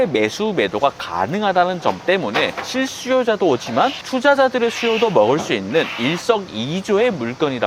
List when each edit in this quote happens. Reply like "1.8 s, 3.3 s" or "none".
none